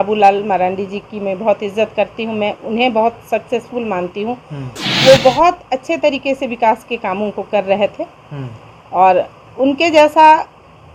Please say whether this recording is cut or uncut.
uncut